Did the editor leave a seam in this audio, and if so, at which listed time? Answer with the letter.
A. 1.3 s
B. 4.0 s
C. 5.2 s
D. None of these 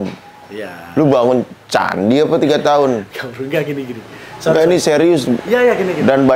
D